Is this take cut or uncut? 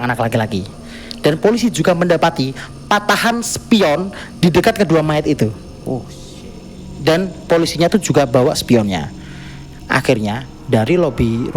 cut